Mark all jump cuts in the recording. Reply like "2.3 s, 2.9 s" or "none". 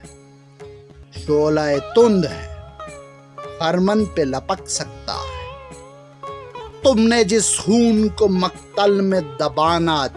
none